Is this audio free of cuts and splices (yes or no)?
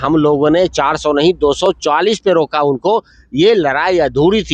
yes